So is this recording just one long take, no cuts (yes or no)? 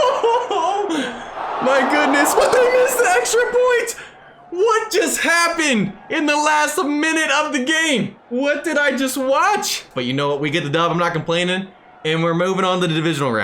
yes